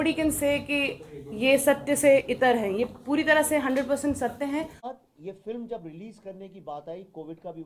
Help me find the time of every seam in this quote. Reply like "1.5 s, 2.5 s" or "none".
4.9 s